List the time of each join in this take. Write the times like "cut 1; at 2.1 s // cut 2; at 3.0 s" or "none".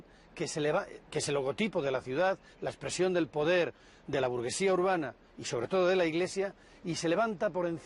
none